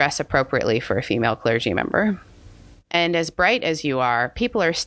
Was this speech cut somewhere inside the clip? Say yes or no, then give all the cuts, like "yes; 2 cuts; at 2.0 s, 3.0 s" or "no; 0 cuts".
yes; 1 cut; at 2.8 s